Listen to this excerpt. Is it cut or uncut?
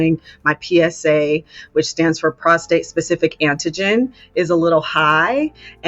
uncut